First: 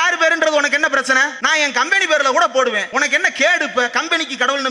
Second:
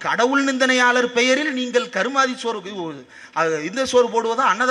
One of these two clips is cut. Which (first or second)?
first